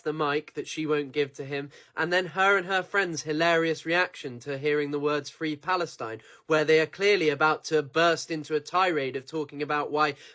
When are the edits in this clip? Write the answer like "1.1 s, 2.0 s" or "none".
9.2 s